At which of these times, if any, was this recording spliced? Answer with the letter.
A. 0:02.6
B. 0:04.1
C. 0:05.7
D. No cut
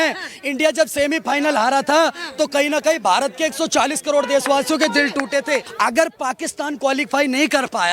C